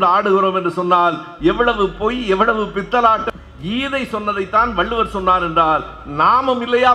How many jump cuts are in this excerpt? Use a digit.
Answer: 1